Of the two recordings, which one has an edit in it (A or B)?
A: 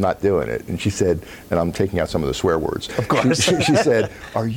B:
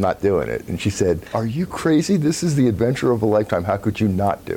B